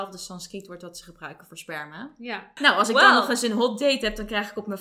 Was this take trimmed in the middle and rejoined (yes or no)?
yes